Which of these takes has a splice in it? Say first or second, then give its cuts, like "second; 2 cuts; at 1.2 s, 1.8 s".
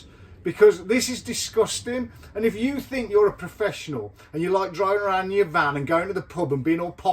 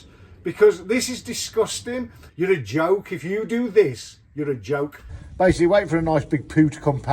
second; 2 cuts; at 2.2 s, 5.2 s